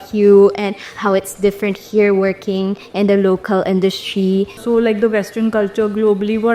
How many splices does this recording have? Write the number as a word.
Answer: one